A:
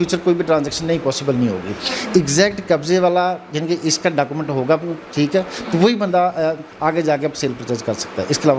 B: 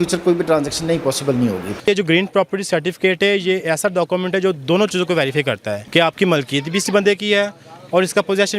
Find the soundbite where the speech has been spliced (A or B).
B